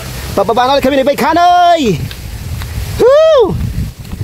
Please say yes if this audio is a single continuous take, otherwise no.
yes